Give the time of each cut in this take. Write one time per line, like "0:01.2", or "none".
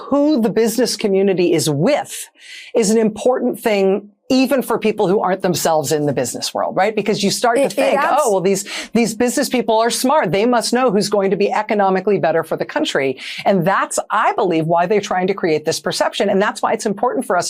none